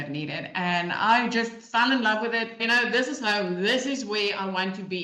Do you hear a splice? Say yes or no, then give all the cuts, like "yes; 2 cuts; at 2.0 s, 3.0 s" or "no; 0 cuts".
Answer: yes; 1 cut; at 2.6 s